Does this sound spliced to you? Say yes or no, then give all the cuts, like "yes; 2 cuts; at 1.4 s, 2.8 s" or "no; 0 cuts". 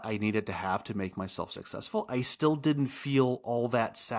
no; 0 cuts